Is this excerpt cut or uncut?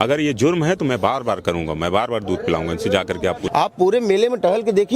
cut